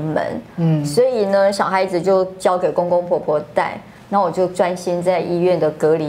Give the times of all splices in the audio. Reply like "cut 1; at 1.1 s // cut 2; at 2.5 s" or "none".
none